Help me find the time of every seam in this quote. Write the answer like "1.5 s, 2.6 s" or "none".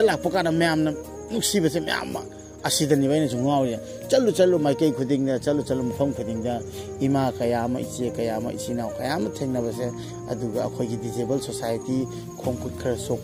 none